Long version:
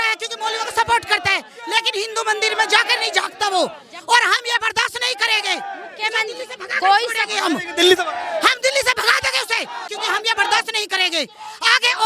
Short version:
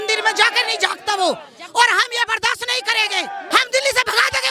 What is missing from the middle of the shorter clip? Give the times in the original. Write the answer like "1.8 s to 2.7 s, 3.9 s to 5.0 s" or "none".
5.8 s to 8.4 s

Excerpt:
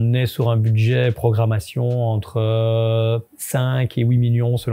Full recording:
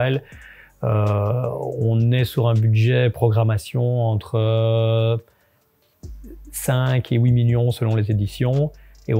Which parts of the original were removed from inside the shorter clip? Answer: 5.3 s to 6.5 s

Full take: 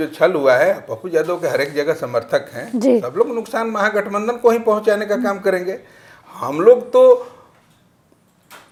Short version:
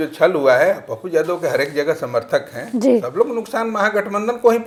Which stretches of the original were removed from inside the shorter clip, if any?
none

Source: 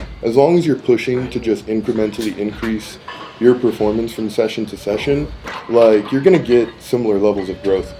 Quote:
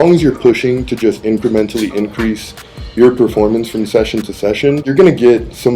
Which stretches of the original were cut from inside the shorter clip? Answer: 5.3 s to 6.1 s

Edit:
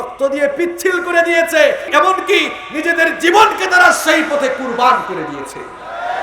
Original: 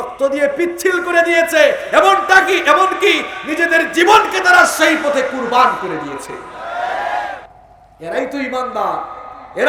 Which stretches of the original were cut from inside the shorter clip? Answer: 1.9 s to 2.6 s

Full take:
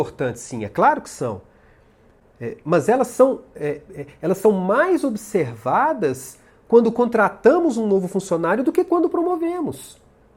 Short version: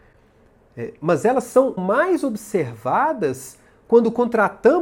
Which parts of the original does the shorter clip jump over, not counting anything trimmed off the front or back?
3.4 s to 4.6 s

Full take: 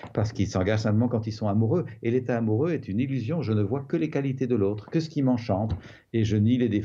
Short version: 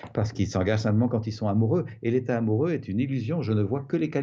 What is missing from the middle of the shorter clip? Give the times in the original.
none

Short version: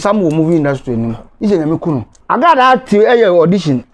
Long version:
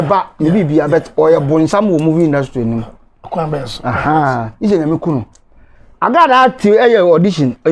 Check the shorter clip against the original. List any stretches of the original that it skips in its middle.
3.0 s to 4.5 s, 5.3 s to 5.9 s

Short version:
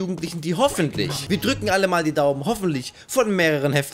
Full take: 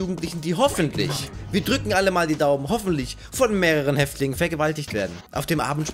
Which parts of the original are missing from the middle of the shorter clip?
1.2 s to 1.4 s

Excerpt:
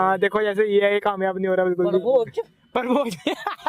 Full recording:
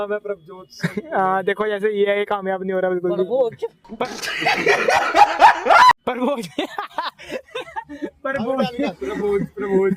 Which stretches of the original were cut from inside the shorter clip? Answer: 4.0 s to 6.1 s

